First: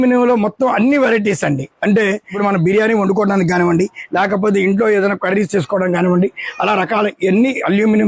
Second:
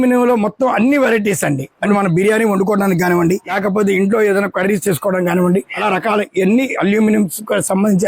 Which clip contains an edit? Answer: second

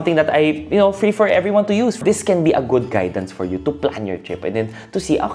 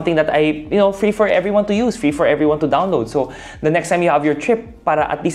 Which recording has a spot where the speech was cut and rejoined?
first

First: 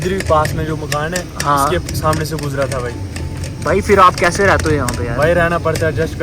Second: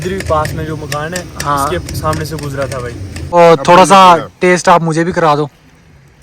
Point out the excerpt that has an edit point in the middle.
second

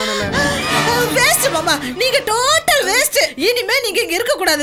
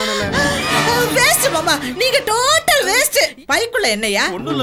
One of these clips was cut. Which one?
second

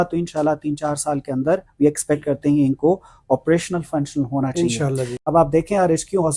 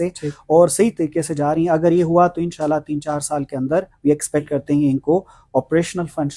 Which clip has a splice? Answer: first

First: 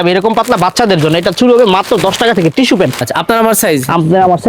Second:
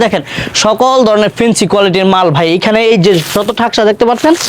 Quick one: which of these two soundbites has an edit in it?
first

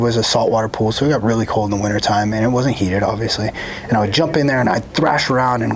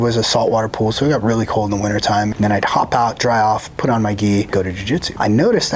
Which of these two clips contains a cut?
second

